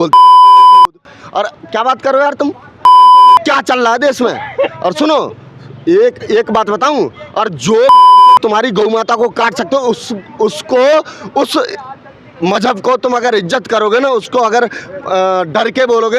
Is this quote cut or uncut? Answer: uncut